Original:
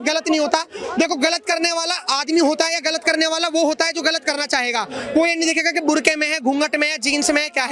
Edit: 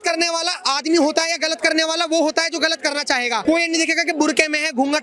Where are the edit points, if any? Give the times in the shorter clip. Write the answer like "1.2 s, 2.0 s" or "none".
3.4 s